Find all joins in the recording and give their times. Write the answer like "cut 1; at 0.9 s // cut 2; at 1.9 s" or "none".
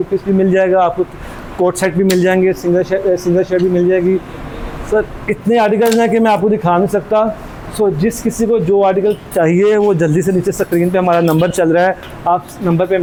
none